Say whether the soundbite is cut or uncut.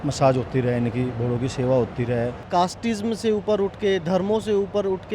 cut